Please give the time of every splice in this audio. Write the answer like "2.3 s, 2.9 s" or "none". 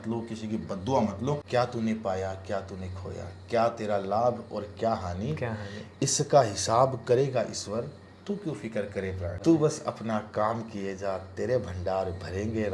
1.4 s, 9.4 s